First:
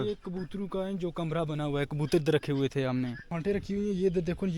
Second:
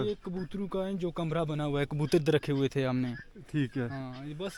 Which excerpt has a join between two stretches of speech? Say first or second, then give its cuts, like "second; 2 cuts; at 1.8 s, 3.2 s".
first; 1 cut; at 3.3 s